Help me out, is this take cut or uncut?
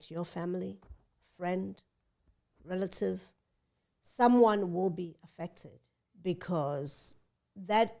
uncut